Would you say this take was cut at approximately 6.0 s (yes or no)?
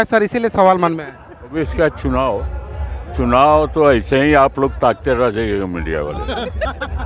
no